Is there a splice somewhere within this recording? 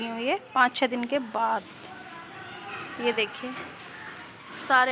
no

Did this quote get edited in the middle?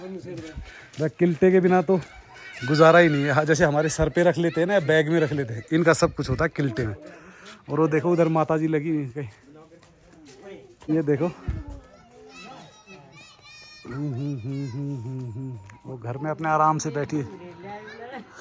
no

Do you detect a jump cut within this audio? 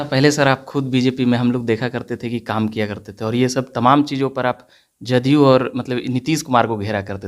no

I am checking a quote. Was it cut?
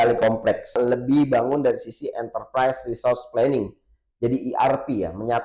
yes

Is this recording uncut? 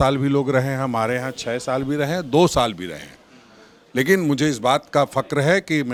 yes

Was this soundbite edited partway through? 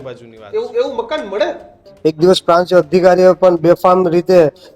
yes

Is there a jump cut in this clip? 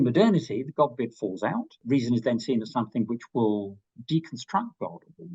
yes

